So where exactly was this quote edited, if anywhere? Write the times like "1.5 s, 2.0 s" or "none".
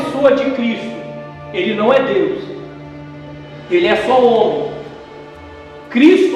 none